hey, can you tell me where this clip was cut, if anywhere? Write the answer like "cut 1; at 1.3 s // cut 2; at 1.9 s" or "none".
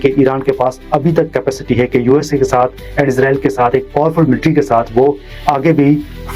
none